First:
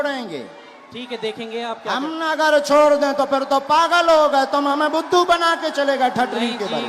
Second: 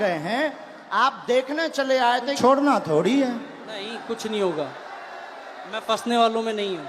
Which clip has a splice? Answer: second; 1 cut; at 2.4 s

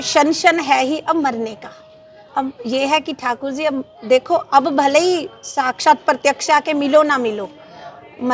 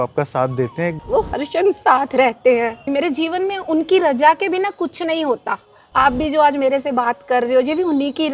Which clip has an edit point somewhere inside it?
second; 2 cuts; at 1.0 s, 2.9 s

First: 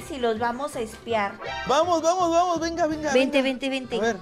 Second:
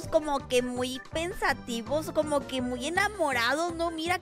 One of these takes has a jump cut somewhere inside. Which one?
first; 1 cut; at 1.6 s

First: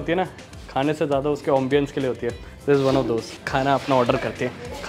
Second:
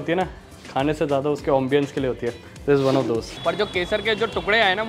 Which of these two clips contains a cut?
second; 1 cut; at 3.3 s

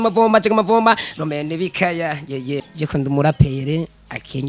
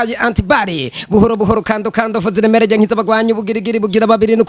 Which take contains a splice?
first; 1 cut; at 2.7 s

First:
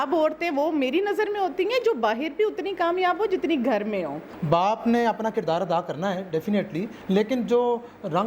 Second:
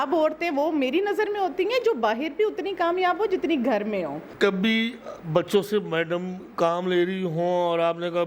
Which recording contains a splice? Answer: first; 2 cuts; at 4.3 s, 6.9 s

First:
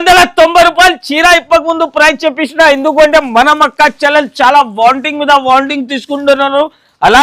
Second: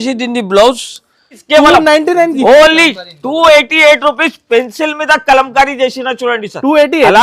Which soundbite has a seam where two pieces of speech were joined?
second; 1 cut; at 1.4 s

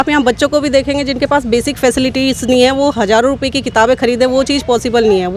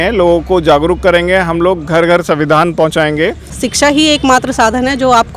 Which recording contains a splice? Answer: second; 1 cut; at 3.6 s

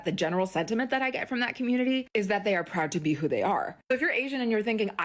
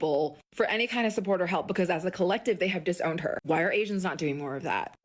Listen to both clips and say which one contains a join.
second; 1 cut; at 3.4 s

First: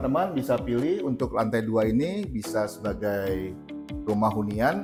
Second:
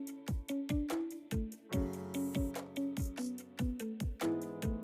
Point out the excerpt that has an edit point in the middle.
second; 2 cuts; at 1.4 s, 3.9 s

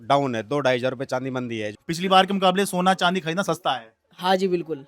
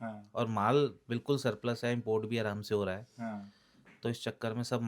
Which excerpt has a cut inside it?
first; 1 cut; at 1.7 s

